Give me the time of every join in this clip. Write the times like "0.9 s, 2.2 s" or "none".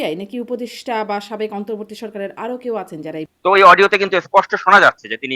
3.3 s